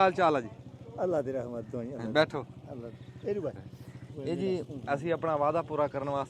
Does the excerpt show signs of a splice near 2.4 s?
no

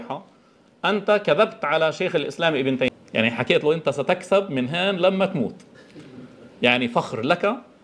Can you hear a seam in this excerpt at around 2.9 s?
yes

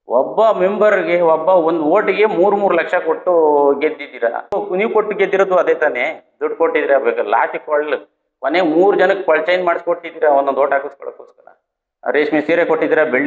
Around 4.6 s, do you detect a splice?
yes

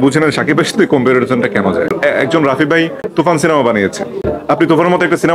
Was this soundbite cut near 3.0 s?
yes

